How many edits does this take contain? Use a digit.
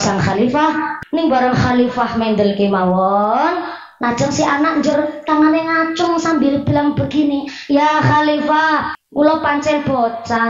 2